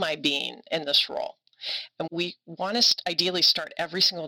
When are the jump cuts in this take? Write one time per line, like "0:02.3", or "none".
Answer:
0:02.1